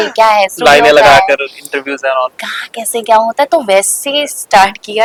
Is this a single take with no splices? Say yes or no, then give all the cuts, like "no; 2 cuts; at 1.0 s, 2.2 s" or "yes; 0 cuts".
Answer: yes; 0 cuts